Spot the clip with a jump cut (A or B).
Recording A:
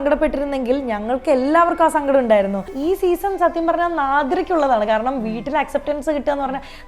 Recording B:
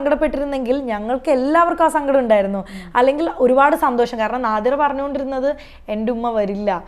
A